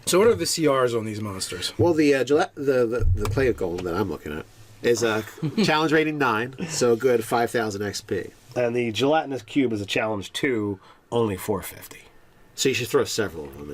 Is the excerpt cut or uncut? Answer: cut